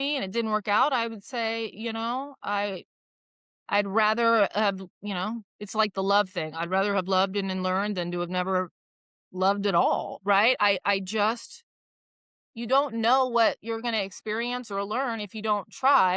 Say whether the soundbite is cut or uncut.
uncut